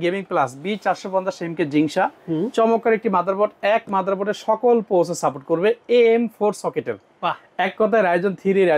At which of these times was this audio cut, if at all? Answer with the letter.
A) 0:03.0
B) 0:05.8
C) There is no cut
C